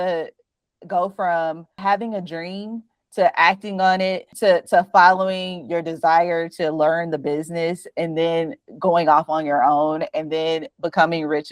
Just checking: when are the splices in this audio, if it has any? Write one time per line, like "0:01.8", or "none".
0:01.7
0:04.3